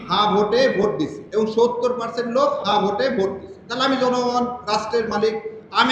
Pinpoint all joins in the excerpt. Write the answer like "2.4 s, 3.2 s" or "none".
1.2 s